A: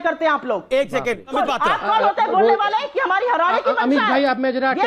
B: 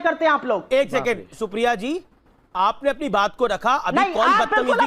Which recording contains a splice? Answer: A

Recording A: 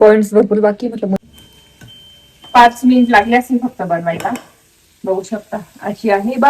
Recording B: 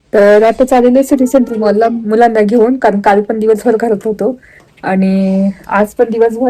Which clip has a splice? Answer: A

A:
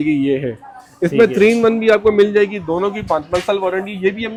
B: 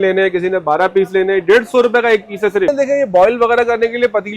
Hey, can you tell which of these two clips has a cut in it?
B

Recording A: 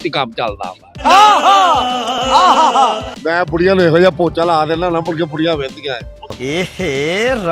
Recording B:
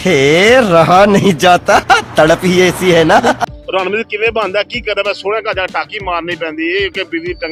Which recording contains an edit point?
A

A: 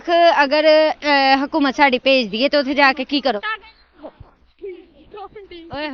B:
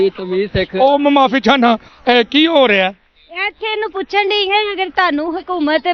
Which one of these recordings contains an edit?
A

